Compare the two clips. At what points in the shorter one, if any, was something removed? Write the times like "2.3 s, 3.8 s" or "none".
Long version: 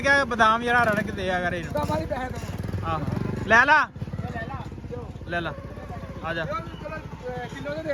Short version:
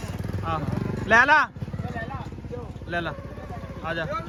none